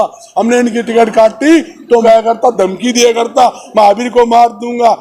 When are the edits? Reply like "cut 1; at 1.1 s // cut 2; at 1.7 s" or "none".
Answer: cut 1; at 2.0 s